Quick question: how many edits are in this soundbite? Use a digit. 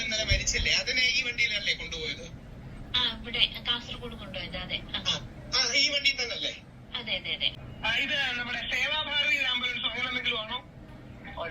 1